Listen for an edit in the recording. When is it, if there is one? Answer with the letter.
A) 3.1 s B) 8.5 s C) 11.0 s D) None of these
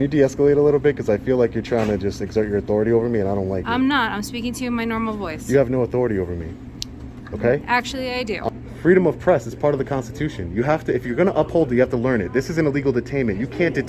B